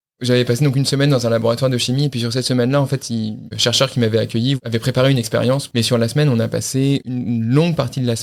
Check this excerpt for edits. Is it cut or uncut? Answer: cut